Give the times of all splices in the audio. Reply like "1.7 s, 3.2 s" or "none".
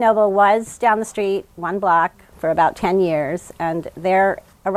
none